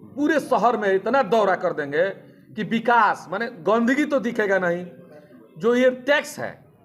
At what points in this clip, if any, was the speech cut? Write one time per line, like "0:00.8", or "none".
none